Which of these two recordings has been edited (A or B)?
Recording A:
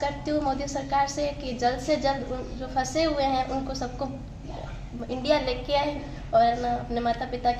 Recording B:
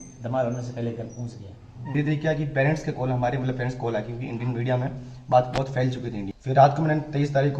B